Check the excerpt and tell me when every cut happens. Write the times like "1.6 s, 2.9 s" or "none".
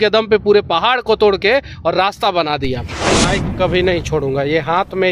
3.1 s